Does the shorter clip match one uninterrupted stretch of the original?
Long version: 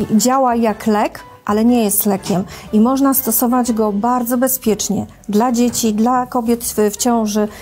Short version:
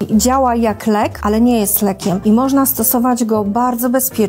no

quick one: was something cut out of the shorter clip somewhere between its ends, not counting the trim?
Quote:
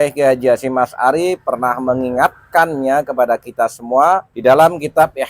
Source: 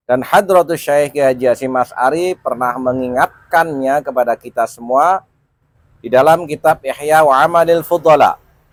yes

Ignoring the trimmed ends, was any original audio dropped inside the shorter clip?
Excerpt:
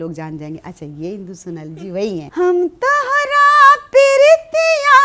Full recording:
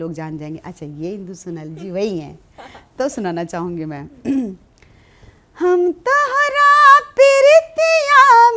yes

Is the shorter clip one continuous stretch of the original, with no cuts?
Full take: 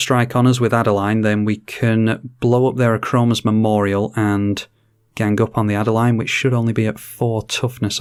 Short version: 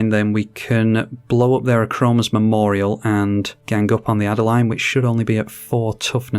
no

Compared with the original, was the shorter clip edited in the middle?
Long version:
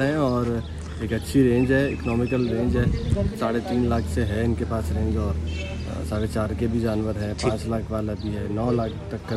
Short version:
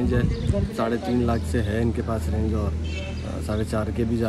no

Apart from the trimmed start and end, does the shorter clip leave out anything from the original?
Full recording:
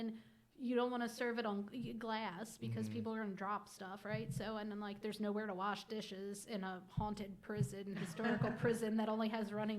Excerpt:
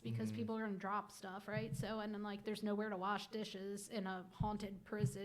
no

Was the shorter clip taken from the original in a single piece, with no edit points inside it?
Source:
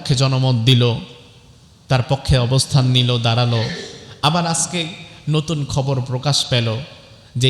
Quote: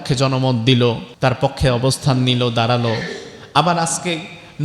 no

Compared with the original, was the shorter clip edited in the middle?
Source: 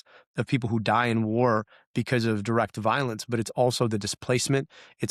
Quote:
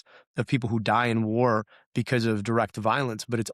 no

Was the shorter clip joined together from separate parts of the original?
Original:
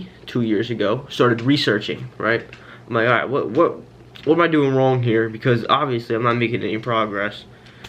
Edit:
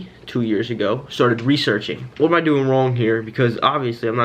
yes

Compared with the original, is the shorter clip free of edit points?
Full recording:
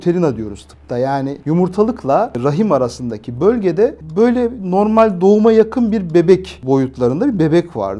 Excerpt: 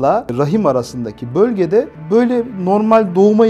yes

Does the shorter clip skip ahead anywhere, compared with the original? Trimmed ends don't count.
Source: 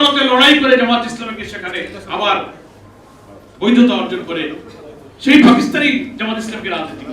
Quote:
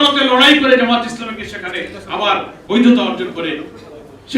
yes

